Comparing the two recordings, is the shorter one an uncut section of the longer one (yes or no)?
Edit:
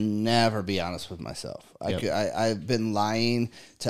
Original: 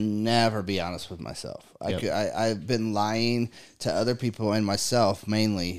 yes